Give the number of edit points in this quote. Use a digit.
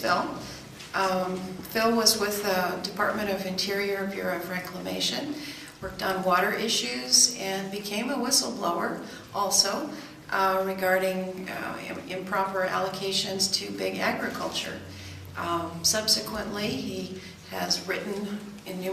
1